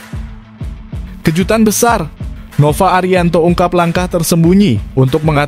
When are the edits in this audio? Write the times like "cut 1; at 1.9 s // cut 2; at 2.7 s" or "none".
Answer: cut 1; at 1.2 s